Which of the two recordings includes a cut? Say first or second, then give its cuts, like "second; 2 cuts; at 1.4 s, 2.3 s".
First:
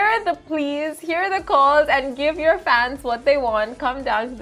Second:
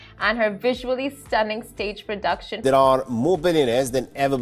second; 1 cut; at 2.6 s